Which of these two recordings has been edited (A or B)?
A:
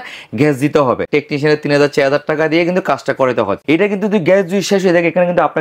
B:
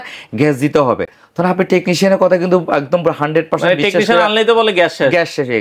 A